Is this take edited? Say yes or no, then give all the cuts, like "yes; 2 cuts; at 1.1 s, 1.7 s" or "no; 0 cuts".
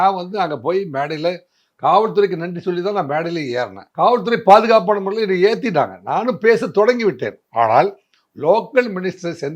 no; 0 cuts